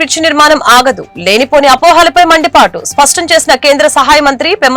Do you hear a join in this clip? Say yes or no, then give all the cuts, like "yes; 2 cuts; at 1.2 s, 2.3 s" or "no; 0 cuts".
no; 0 cuts